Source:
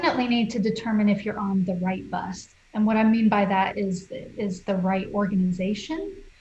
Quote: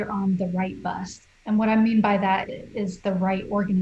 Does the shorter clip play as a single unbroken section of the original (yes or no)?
no